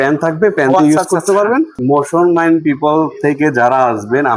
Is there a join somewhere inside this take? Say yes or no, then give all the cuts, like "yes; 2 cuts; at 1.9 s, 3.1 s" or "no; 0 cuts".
yes; 1 cut; at 1.8 s